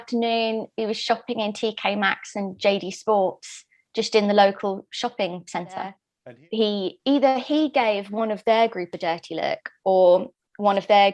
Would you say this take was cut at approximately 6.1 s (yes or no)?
yes